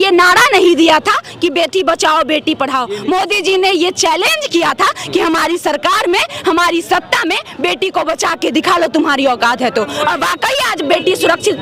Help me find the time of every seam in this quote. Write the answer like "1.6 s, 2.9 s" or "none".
none